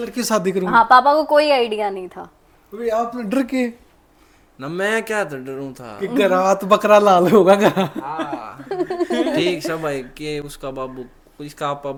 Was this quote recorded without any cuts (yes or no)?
yes